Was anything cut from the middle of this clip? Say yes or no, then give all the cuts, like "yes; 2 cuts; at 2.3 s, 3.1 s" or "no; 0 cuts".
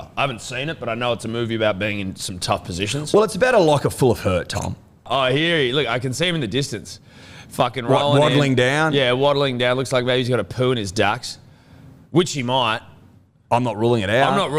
yes; 1 cut; at 5.1 s